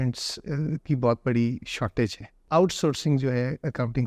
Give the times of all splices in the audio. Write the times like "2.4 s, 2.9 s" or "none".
2.4 s